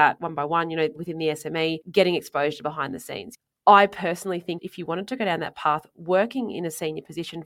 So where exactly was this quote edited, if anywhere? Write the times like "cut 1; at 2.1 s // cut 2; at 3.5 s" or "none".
cut 1; at 1.4 s // cut 2; at 3.4 s

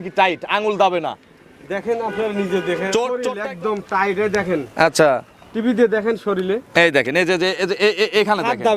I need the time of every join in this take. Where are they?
cut 1; at 3.1 s

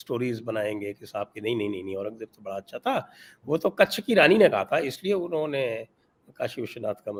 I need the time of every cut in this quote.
none

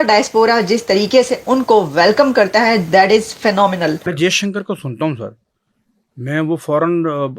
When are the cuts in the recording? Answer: cut 1; at 4.1 s

